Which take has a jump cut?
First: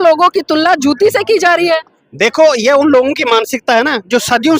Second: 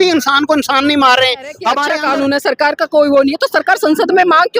second; 1 cut; at 1.6 s

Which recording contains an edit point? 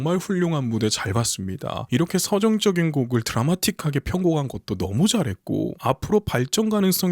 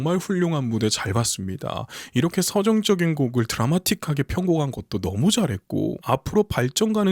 first; 1 cut; at 1.8 s

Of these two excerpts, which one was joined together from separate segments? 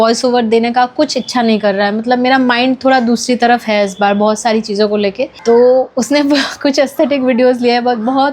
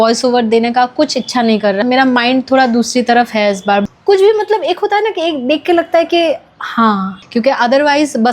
second; 3 cuts; at 1.8 s, 3.8 s, 7.2 s

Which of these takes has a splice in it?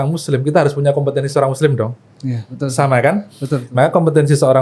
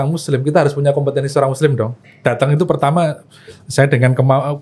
second; 1 cut; at 2.0 s

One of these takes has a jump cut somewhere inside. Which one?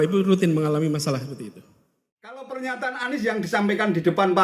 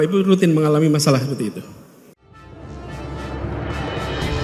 first; 1 cut; at 2.4 s

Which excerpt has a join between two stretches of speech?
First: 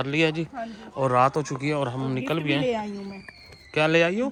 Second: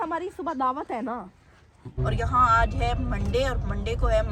second; 1 cut; at 2.0 s

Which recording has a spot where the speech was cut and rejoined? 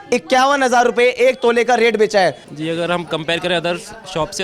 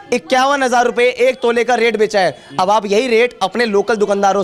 first; 1 cut; at 2.4 s

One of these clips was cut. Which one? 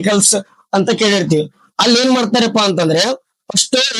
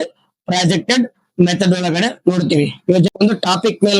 second; 1 cut; at 3.1 s

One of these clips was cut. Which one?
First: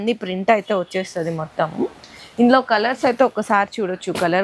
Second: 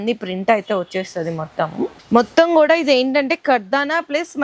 second; 1 cut; at 2.0 s

